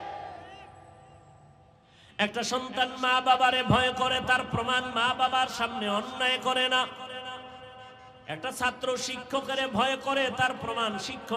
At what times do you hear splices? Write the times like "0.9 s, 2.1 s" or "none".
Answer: 1.9 s